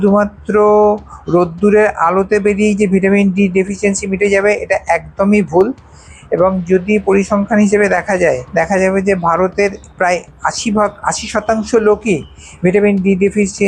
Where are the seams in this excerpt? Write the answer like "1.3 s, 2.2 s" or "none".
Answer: none